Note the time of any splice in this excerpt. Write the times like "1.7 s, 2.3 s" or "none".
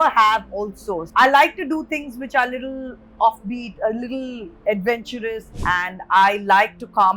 5.5 s